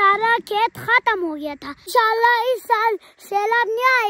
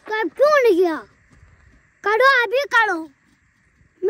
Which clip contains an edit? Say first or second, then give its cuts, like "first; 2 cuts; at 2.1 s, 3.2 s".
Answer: first; 1 cut; at 1.9 s